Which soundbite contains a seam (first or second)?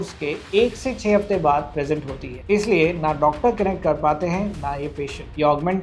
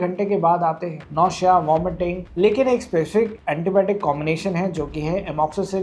second